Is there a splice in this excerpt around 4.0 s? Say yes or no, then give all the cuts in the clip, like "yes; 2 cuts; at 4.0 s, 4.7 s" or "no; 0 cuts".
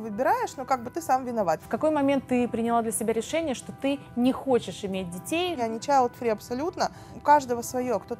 no; 3 cuts; at 1.7 s, 5.6 s, 7.1 s